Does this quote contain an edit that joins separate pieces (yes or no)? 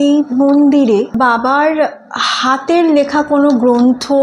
yes